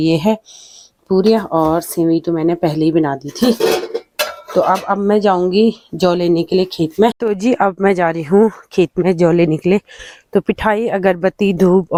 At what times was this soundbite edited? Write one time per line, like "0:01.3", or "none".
none

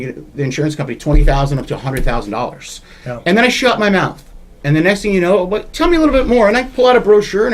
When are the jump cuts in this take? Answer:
none

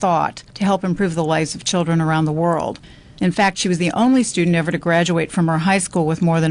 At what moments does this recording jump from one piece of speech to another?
none

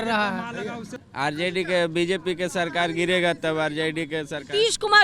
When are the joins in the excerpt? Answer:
0:00.9

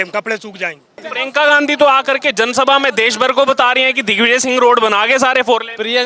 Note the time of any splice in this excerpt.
0:01.1

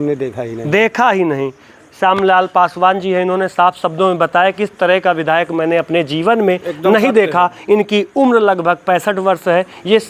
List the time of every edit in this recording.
none

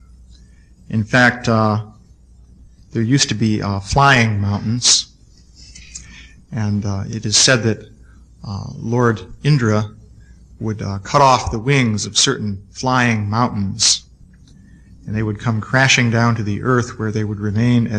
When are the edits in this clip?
0:09.6

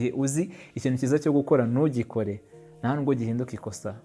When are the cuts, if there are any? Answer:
none

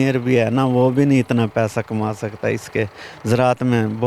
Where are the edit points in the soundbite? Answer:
none

